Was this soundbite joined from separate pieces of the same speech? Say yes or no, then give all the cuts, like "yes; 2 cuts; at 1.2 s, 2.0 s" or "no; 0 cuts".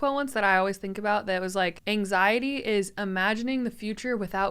yes; 1 cut; at 1.8 s